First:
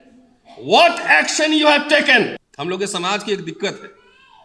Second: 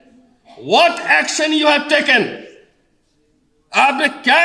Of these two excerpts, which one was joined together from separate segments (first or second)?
first